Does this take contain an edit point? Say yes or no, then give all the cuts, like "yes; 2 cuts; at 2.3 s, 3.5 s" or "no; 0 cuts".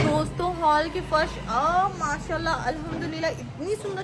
no; 0 cuts